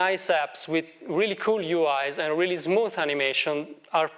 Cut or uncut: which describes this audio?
uncut